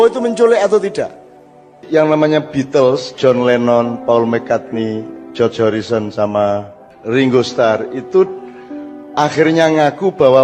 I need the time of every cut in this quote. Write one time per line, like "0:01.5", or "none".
0:01.8